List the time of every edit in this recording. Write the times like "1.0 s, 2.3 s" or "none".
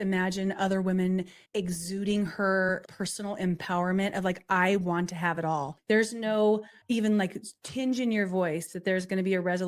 1.4 s, 2.9 s, 5.7 s, 6.7 s